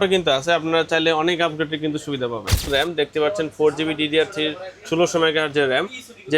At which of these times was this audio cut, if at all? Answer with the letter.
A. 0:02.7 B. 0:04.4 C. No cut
A